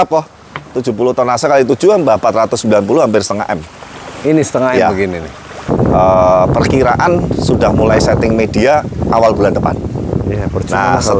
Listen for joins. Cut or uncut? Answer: cut